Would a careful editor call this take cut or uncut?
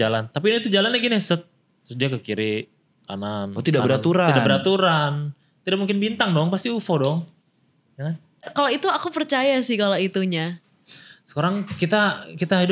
cut